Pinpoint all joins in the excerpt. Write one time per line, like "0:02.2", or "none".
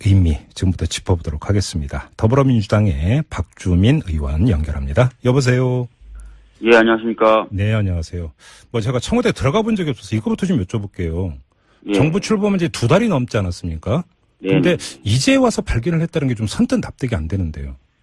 none